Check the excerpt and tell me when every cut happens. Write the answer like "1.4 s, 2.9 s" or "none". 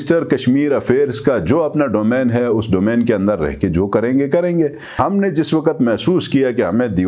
4.9 s

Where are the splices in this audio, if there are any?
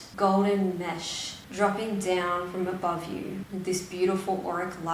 3.4 s

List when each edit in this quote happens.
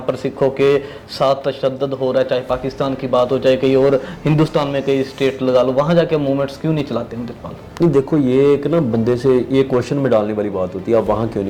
none

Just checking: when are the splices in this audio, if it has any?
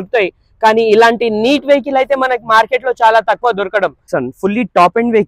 4.0 s

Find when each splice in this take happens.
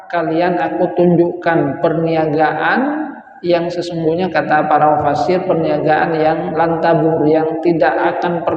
none

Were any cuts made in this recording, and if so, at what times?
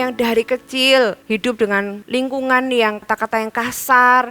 1.6 s, 3.0 s

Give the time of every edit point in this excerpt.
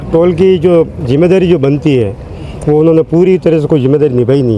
none

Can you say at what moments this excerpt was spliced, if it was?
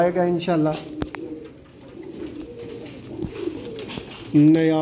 none

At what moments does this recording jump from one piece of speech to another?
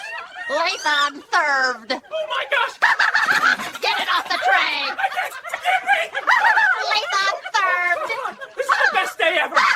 none

